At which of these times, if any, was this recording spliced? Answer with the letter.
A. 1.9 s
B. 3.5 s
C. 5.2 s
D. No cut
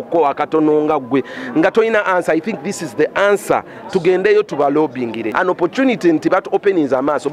C